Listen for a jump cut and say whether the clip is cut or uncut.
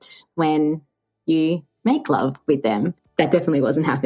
cut